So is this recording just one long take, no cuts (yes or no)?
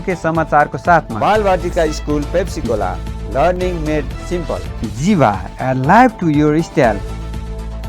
no